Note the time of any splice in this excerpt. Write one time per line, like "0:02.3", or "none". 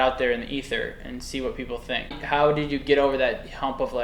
0:02.2